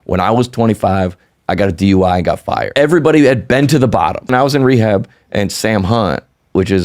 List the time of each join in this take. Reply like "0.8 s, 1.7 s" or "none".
2.8 s, 4.3 s